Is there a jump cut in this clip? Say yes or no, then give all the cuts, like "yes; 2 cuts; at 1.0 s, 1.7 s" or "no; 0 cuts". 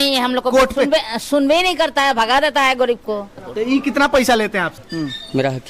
yes; 2 cuts; at 3.4 s, 4.8 s